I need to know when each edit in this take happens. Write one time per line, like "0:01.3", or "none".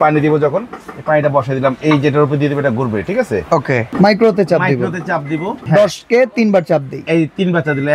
0:03.9
0:05.6